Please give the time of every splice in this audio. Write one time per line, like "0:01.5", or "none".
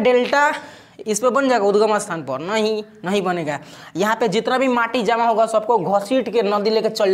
none

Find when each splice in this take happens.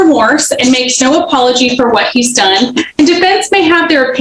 none

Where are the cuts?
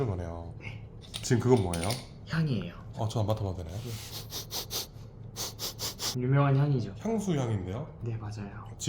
0:06.0

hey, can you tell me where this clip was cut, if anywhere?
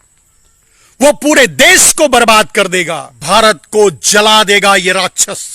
0:03.1

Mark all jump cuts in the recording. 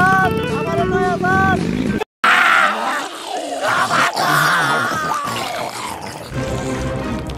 0:02.0

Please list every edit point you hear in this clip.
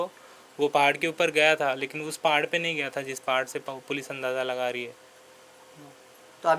none

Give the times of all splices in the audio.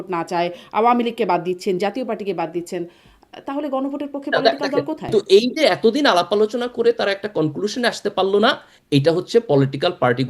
0:05.1

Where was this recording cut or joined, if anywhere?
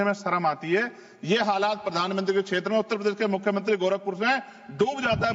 none

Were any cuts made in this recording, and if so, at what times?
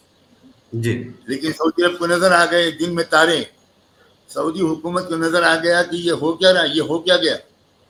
none

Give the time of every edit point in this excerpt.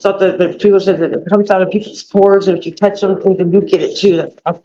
none

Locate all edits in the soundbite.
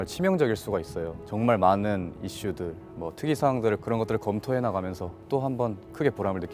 0:01.2
0:03.8
0:05.2

